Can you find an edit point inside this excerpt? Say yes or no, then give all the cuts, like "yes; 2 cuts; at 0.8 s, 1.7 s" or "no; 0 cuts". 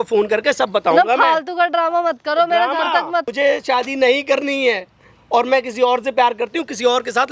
yes; 1 cut; at 3.3 s